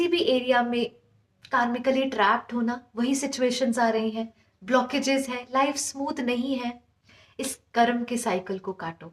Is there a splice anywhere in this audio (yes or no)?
no